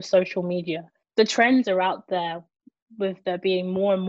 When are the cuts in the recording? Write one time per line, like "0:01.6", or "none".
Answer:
0:00.9